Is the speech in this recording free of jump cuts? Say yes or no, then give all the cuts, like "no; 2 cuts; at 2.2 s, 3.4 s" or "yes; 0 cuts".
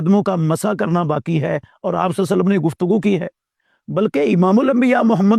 yes; 0 cuts